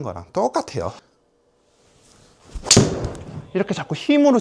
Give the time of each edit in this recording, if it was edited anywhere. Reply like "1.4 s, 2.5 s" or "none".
1.0 s